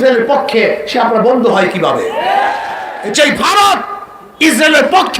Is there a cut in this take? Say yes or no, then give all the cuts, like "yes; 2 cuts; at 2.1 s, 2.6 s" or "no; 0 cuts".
yes; 1 cut; at 3.0 s